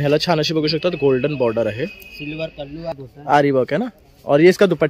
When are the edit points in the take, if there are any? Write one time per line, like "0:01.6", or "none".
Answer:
0:02.9